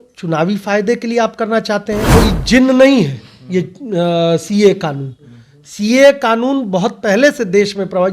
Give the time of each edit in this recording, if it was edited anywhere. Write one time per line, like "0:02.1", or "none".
0:02.1